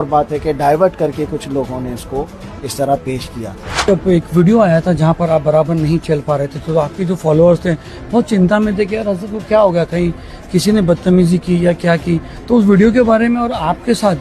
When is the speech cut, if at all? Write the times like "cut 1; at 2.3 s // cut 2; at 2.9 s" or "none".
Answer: cut 1; at 3.9 s